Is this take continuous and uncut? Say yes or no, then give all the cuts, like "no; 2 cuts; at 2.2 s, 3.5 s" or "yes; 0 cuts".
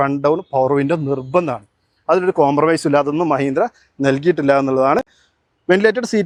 yes; 0 cuts